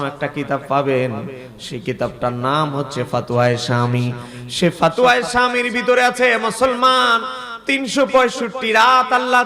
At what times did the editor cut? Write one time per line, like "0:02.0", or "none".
none